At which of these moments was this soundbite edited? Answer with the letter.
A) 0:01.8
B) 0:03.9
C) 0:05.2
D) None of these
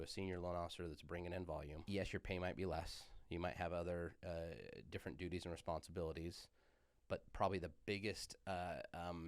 A